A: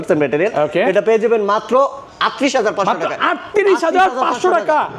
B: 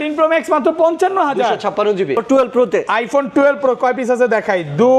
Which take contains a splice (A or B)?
B